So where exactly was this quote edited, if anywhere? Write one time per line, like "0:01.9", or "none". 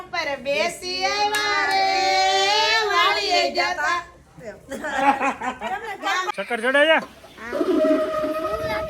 0:06.3